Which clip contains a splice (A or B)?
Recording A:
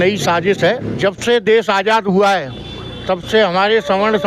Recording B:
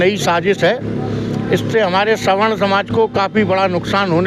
A